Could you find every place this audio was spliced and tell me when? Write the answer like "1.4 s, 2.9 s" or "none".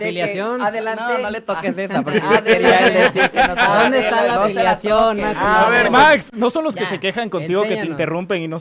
none